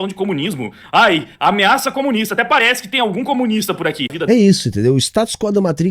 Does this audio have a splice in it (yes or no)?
yes